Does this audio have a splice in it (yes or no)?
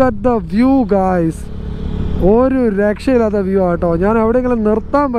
no